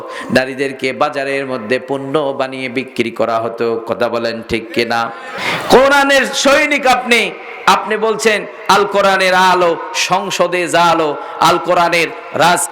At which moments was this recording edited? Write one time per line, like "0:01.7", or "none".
0:05.3